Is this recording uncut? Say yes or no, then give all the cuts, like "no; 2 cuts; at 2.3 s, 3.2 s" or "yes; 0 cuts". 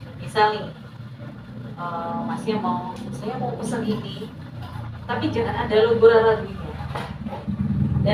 yes; 0 cuts